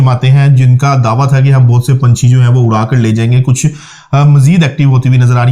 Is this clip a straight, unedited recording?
yes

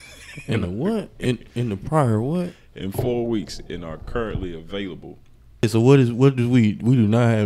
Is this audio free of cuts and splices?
no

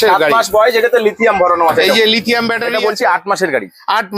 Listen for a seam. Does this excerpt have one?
yes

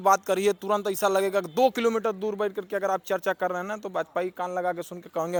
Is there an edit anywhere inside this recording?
no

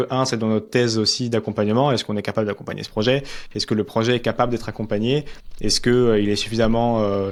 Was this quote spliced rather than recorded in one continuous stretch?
no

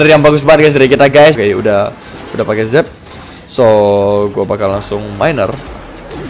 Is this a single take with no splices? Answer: no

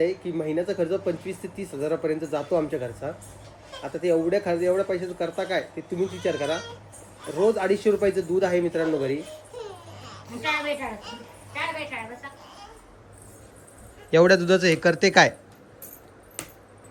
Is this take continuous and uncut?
yes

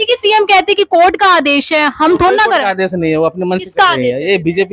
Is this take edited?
no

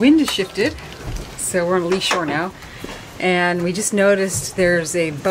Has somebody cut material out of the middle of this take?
no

